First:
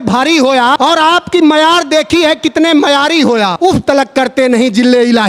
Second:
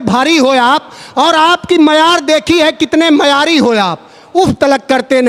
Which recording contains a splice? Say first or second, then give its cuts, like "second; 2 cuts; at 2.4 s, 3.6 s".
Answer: first; 2 cuts; at 0.8 s, 3.5 s